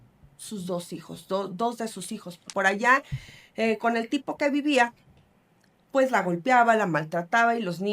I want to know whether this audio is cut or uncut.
cut